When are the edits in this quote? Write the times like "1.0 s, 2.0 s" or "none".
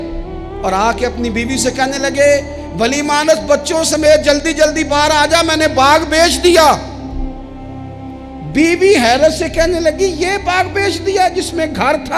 none